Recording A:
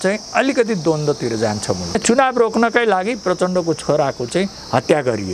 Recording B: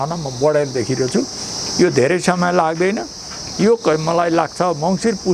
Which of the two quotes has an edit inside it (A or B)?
A